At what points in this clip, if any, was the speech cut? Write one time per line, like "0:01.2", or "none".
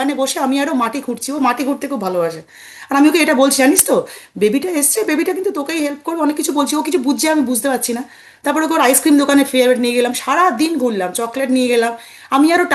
none